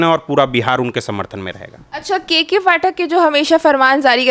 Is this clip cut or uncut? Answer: uncut